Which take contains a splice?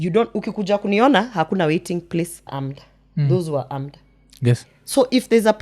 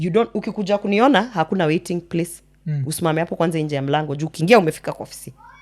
first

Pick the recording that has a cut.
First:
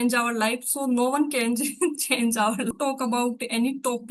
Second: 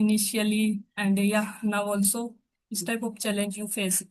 first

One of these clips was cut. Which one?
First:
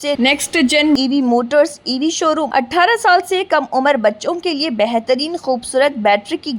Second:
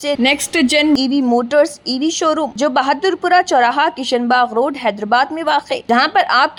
first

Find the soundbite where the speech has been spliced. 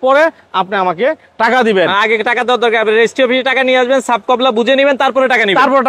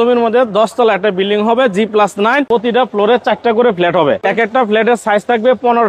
second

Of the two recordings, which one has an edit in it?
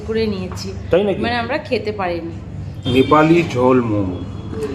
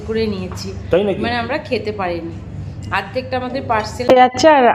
first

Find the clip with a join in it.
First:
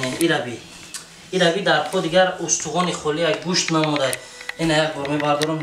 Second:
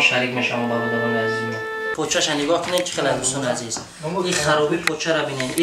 second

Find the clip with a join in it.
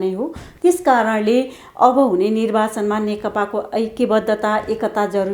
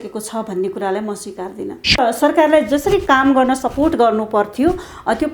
second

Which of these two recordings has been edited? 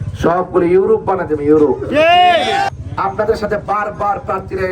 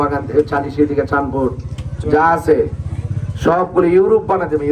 first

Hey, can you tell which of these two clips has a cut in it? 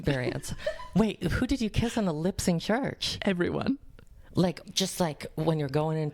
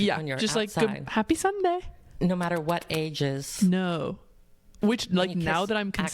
first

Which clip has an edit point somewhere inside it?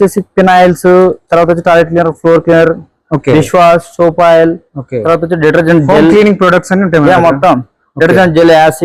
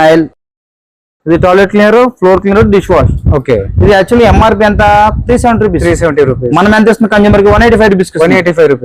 second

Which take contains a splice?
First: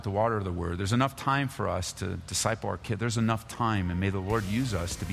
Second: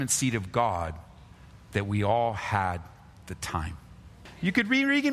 second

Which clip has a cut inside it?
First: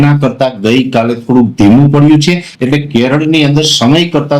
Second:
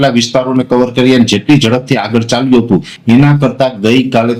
first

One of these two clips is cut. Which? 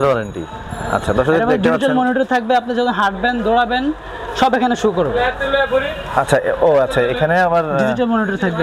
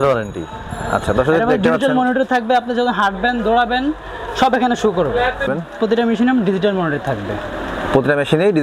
second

